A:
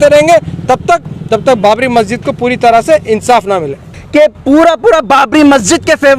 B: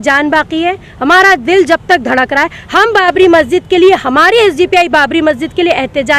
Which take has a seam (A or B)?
A